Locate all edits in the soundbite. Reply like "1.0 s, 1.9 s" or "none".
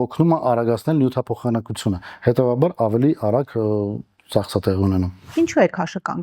5.3 s